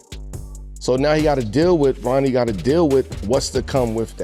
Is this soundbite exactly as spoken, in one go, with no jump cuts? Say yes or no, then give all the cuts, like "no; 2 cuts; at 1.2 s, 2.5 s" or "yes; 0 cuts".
yes; 0 cuts